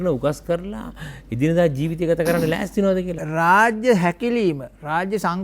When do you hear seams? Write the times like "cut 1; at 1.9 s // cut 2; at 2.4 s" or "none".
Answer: cut 1; at 3.1 s